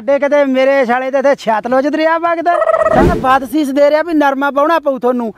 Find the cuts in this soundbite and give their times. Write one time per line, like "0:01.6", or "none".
0:03.1